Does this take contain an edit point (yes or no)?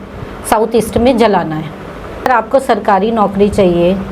yes